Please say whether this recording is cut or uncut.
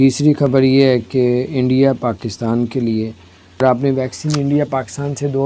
cut